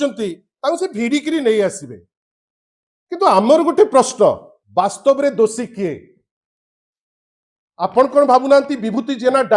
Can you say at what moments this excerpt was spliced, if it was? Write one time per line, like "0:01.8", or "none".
0:04.5